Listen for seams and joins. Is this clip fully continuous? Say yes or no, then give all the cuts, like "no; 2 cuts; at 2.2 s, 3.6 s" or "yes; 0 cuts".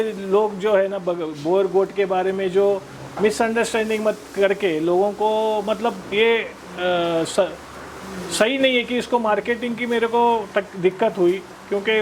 yes; 0 cuts